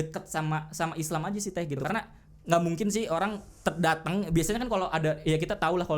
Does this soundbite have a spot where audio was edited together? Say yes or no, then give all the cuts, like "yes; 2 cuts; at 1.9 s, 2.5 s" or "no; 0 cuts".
yes; 1 cut; at 1.8 s